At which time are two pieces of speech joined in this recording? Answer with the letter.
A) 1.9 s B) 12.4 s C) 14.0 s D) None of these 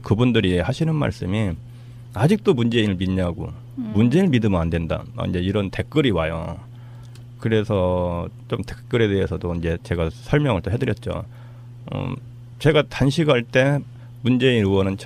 A